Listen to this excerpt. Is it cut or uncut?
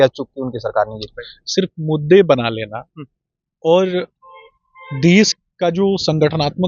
uncut